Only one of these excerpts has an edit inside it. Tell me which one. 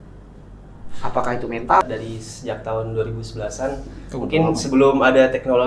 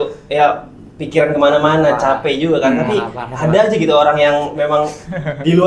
first; 1 cut; at 1.8 s

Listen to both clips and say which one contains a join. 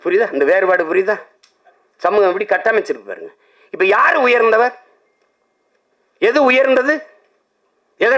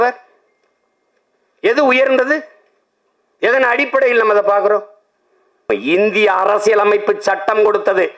second; 1 cut; at 5.7 s

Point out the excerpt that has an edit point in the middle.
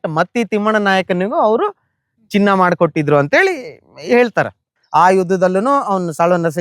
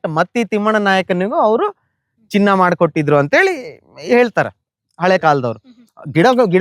first; 1 cut; at 4.8 s

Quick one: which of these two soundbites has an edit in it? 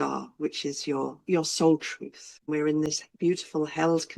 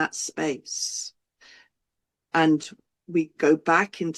first; 1 cut; at 2.5 s

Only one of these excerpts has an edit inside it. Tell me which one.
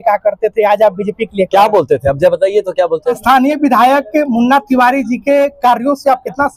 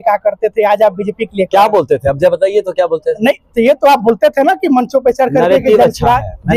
first; 1 cut; at 3.2 s

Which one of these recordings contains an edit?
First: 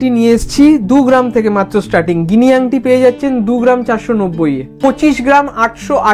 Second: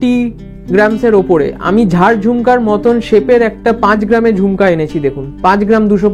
first; 1 cut; at 4.7 s

